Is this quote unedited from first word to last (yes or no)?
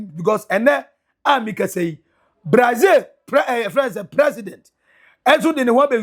yes